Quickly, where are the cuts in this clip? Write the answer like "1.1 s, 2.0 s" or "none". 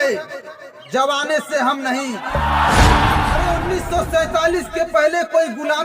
3.4 s

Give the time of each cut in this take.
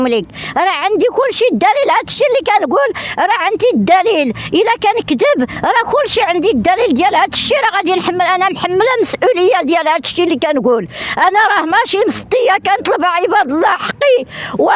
none

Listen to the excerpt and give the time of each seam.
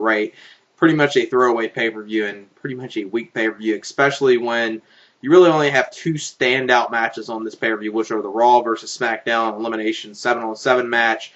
2.6 s

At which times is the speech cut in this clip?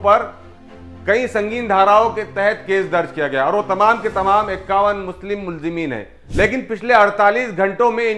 6.1 s

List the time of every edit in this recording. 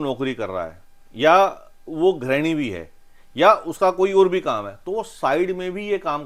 none

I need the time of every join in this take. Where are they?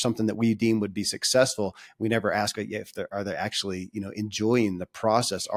none

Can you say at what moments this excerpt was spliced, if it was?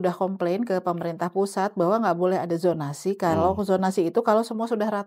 none

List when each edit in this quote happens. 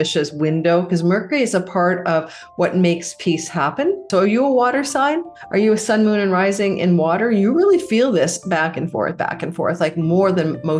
4.0 s

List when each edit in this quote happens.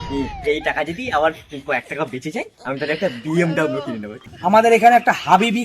4.3 s

